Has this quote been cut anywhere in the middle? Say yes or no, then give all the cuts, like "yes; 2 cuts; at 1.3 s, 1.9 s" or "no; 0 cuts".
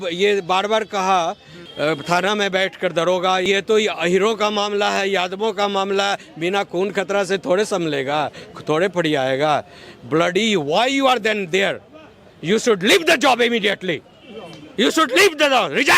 yes; 2 cuts; at 1.6 s, 3.5 s